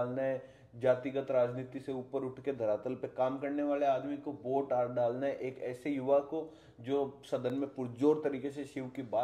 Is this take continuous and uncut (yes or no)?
yes